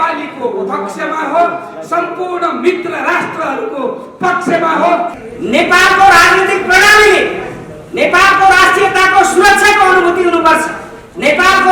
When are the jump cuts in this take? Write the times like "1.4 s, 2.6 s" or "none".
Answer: 5.2 s